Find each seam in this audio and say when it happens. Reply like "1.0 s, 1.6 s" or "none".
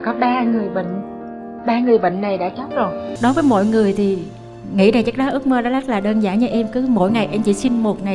3.0 s